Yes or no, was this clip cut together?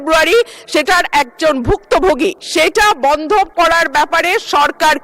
yes